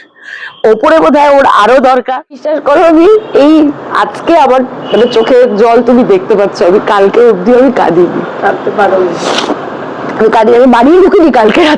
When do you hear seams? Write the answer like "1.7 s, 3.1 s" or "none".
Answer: 2.5 s